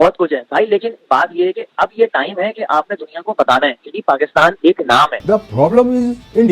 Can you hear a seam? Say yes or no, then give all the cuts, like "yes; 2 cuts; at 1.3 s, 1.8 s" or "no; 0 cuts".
yes; 1 cut; at 5.2 s